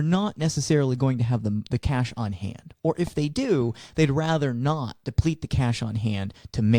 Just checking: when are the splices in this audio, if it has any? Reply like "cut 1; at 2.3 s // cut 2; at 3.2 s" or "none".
none